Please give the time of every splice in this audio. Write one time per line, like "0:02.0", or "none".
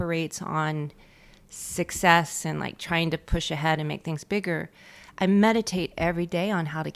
none